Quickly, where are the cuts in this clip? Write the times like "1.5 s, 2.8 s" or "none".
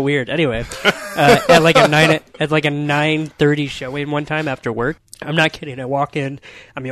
5.0 s